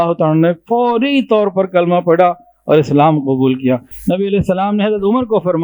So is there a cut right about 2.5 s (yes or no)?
no